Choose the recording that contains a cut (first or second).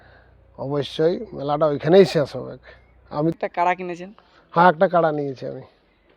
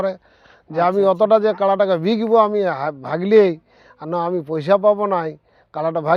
first